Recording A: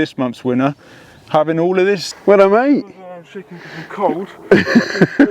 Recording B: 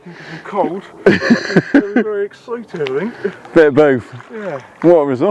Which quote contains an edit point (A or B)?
A